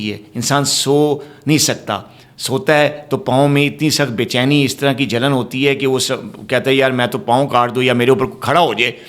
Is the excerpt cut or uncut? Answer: uncut